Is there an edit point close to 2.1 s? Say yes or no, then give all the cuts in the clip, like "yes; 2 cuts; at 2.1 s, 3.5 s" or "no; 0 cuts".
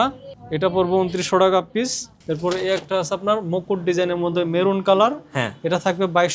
yes; 1 cut; at 2.1 s